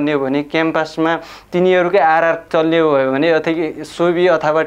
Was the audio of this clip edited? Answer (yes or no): no